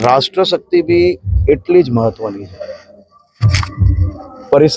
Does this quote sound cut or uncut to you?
uncut